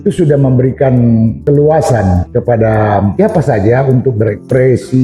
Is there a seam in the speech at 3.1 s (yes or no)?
yes